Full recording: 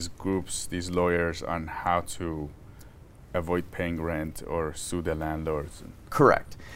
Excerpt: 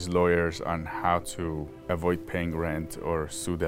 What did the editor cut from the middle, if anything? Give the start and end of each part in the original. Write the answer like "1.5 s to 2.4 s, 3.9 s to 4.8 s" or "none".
2.5 s to 3.2 s